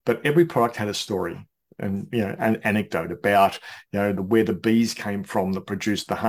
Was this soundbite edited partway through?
no; 0 cuts

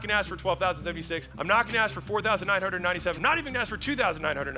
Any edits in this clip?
yes; 2 cuts; at 1.3 s, 3.2 s

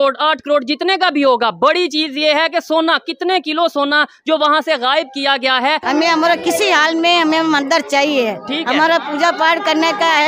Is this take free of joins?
no; 1 cut; at 5.8 s

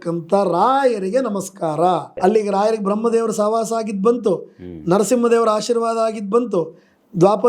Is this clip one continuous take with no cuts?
no; 1 cut; at 2.1 s

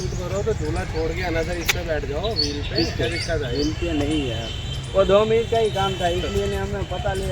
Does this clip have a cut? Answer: yes; 1 cut; at 1.2 s

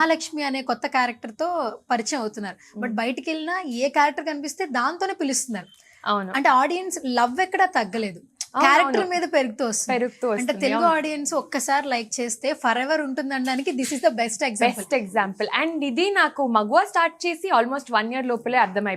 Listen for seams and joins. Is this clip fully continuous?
yes; 0 cuts

